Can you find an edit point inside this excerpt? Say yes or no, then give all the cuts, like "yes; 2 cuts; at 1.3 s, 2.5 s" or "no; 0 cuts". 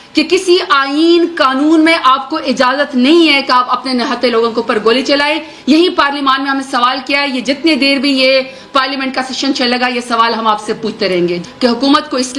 yes; 1 cut; at 11.4 s